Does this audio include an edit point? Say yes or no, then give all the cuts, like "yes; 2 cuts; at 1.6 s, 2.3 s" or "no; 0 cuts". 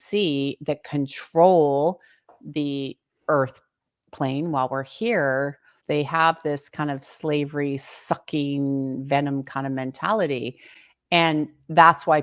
yes; 1 cut; at 5.7 s